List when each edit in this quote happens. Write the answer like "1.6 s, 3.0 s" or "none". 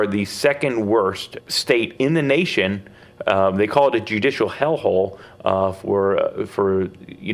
1.3 s